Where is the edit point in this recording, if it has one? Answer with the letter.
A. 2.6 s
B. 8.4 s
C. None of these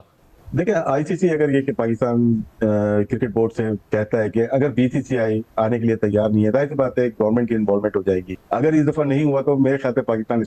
B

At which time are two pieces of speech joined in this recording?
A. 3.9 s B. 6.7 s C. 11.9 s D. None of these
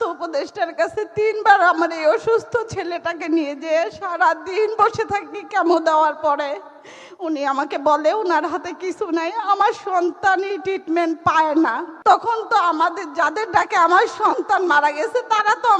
C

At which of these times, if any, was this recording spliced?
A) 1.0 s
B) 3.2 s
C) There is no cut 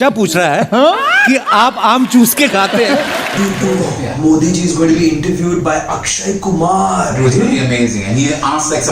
B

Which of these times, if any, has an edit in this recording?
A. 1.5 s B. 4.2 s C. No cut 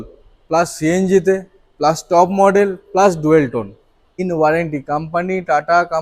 B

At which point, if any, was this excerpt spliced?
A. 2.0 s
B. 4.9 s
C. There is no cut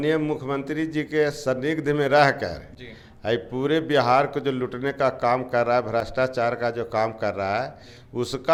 C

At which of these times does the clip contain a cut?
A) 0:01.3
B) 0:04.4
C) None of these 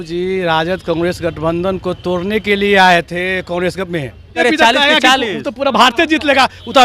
B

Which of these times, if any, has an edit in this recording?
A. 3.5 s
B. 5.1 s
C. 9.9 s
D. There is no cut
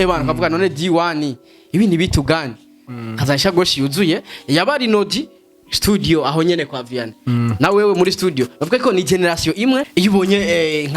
C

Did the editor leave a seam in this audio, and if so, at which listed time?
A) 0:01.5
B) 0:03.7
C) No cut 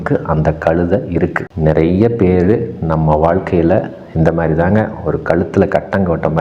A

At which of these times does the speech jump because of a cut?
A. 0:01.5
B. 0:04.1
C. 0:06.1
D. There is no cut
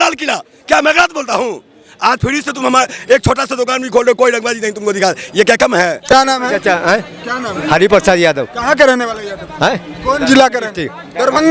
C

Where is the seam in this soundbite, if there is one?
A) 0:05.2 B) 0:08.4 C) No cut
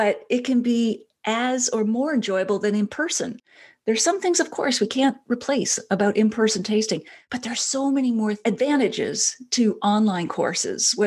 B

